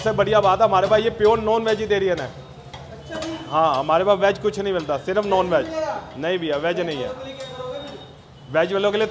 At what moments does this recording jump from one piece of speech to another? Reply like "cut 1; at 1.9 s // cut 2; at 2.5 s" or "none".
none